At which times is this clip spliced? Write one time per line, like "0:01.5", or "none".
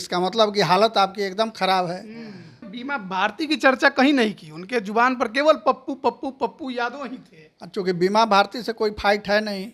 0:02.7